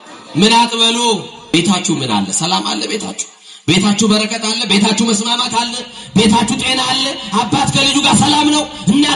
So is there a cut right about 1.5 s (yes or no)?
yes